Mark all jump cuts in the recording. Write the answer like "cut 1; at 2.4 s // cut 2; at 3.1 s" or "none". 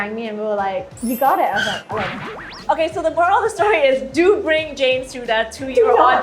cut 1; at 0.9 s // cut 2; at 2.6 s